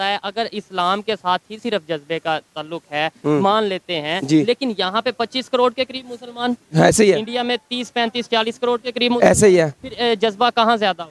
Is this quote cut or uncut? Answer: uncut